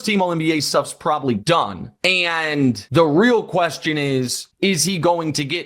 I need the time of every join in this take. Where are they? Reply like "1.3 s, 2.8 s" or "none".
1.4 s, 2.8 s, 4.4 s